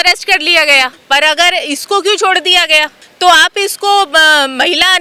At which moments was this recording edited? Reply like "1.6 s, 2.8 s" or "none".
1.0 s, 3.0 s